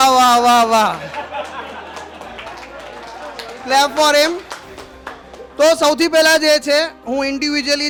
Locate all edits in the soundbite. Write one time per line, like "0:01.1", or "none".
none